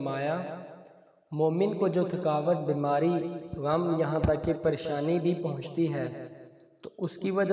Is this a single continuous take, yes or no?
yes